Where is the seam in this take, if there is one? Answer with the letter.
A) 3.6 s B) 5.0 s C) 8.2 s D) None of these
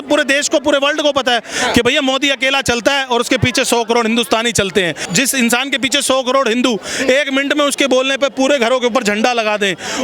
B